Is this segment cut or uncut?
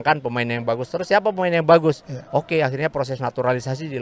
uncut